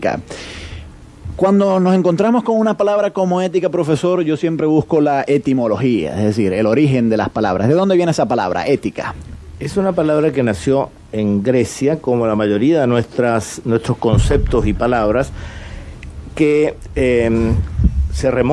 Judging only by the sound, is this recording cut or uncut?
cut